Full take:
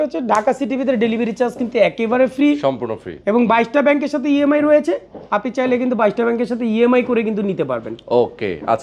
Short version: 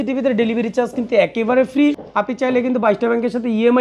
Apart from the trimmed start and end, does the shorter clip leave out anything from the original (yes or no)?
yes